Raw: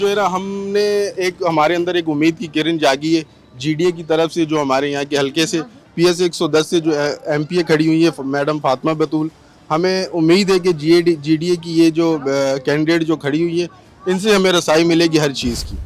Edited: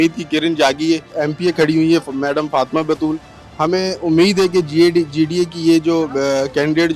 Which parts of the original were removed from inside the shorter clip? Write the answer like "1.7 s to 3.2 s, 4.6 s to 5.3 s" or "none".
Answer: 3.3 s to 7.2 s